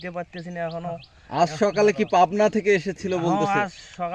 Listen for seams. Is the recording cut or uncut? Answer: uncut